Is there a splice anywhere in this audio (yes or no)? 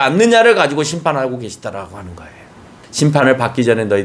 yes